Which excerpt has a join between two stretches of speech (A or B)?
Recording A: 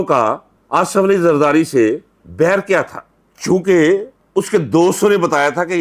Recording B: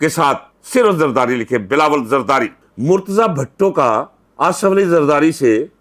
B